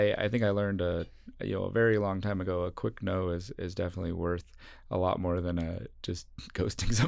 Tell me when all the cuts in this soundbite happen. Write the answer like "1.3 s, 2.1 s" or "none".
none